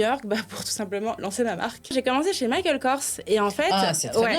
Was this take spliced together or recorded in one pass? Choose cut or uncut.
cut